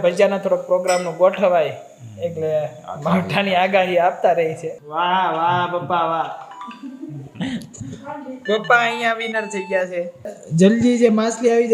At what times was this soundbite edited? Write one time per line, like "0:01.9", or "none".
0:04.8
0:10.4